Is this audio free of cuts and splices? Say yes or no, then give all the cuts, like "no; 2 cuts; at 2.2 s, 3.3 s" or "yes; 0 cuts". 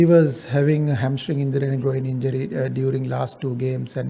yes; 0 cuts